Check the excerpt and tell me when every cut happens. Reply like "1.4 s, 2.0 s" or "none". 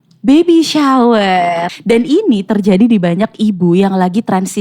1.7 s